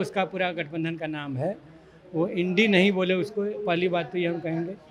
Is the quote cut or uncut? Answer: uncut